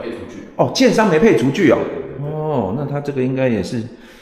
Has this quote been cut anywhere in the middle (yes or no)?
no